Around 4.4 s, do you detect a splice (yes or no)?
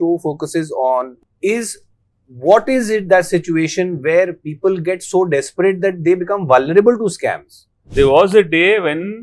no